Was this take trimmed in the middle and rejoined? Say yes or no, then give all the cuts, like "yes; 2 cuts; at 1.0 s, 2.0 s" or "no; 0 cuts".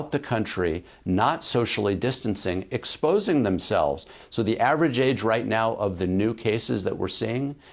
yes; 1 cut; at 4.1 s